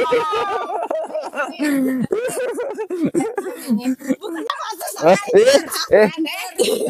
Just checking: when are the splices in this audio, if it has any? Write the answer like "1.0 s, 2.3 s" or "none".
4.5 s